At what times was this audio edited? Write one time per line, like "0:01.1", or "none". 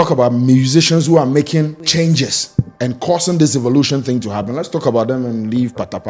0:01.8